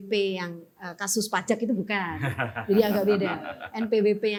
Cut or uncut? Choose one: uncut